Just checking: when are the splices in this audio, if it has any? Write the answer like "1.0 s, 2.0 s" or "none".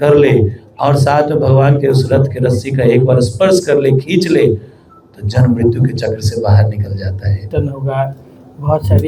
7.5 s